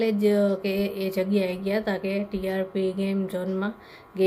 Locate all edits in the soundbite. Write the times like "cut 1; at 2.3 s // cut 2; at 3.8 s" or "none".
none